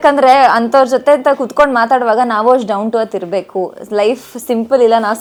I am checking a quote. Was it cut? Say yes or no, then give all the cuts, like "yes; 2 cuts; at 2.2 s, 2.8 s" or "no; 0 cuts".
no; 0 cuts